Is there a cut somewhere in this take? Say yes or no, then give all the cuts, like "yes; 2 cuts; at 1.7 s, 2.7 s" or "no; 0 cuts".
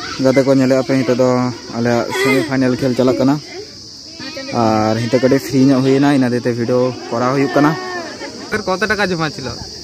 yes; 1 cut; at 8.5 s